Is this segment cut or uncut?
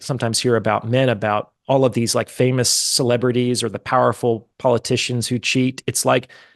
uncut